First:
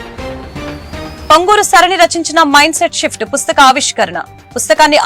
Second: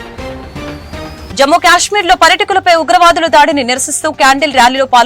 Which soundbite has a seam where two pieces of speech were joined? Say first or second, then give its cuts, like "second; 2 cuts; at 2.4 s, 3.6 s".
first; 1 cut; at 1.2 s